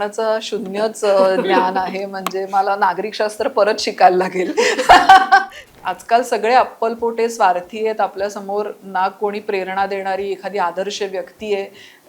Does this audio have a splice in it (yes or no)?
yes